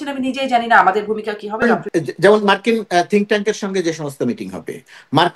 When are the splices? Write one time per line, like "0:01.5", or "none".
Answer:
0:01.6